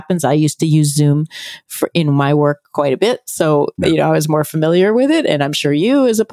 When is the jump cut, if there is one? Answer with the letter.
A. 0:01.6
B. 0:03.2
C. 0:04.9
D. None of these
D